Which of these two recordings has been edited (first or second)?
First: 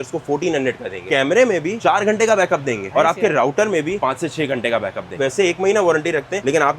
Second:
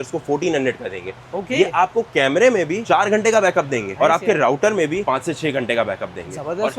first